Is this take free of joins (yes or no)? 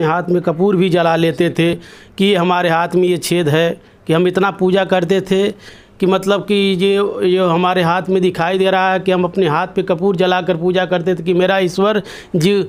yes